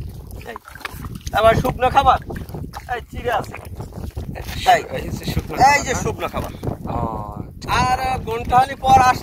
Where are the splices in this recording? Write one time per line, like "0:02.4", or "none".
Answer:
0:04.1
0:07.7